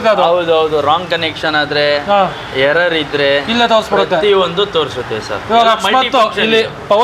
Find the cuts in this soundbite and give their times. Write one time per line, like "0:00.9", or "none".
none